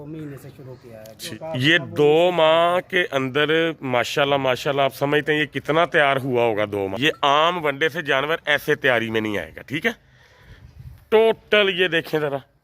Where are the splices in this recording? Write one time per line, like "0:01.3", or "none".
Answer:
0:01.2
0:06.9